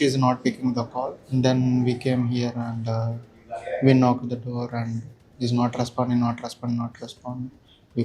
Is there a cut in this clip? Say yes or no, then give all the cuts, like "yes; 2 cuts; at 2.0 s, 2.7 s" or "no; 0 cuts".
yes; 1 cut; at 1.2 s